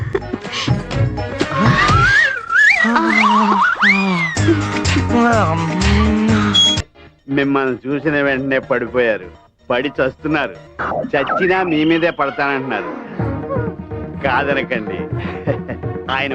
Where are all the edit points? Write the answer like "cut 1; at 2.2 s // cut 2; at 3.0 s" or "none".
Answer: cut 1; at 6.9 s